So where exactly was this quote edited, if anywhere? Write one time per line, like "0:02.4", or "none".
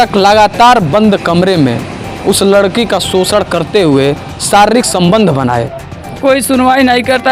0:06.2